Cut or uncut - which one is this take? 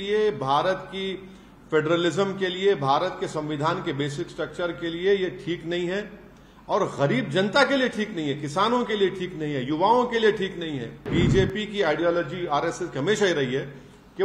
cut